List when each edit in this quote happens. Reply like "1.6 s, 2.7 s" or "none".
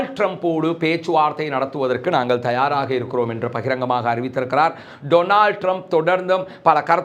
none